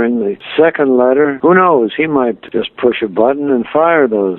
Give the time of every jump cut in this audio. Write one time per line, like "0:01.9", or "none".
0:02.4